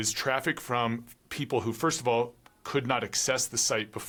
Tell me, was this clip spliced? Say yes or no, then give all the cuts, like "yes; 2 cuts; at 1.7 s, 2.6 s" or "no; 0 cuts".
no; 0 cuts